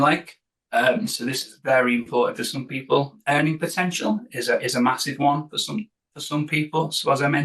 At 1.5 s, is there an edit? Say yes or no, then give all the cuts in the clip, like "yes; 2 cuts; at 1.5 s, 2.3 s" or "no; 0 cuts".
no; 1 cut; at 3.2 s